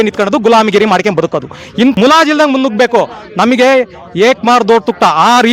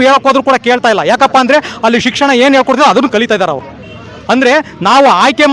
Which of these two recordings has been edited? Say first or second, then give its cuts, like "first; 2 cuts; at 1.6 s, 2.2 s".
first; 1 cut; at 1.9 s